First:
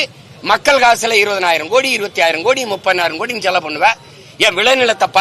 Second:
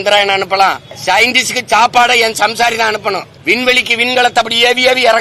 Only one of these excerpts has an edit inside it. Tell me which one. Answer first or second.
second